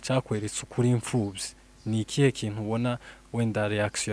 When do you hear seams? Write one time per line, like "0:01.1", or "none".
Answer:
none